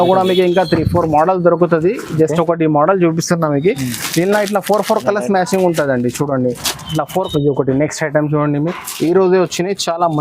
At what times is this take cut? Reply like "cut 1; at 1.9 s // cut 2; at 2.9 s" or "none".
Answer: cut 1; at 7.1 s